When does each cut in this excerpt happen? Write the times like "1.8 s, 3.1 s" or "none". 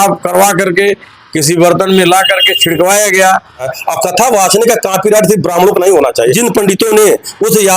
3.9 s, 6.4 s